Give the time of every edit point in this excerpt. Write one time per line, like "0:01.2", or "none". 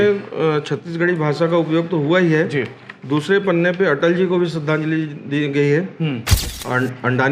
0:06.3